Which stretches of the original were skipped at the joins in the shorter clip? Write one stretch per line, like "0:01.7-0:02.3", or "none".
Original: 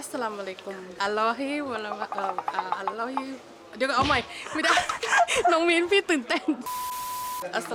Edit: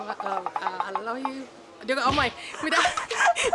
none